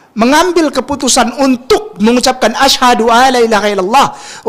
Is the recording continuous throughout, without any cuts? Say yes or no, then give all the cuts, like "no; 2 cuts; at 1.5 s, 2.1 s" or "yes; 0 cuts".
yes; 0 cuts